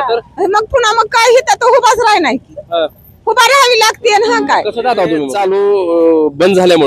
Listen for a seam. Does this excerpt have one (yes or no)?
yes